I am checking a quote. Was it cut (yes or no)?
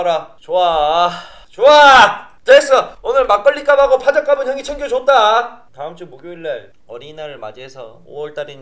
yes